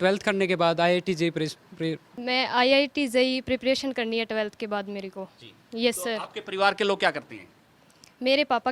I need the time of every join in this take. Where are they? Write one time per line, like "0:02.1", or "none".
0:02.1